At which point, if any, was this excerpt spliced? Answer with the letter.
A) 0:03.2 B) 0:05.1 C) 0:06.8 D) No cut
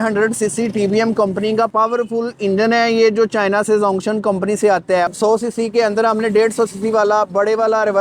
B